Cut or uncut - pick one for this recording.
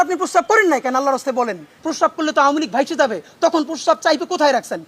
cut